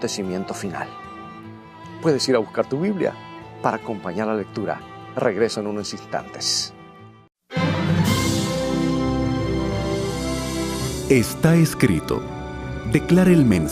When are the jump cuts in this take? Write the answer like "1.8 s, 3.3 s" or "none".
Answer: 12.0 s